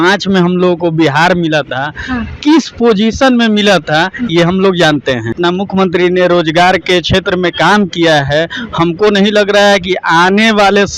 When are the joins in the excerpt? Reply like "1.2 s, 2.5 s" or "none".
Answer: 5.4 s